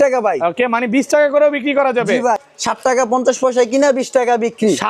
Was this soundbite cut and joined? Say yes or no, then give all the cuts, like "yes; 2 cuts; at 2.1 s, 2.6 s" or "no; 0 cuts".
yes; 1 cut; at 2.5 s